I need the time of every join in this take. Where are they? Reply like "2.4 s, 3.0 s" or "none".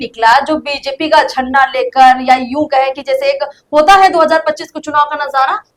none